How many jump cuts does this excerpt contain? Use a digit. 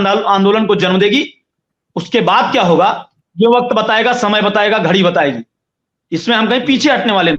0